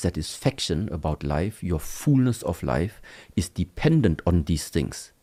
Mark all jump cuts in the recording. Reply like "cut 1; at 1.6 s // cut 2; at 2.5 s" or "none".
none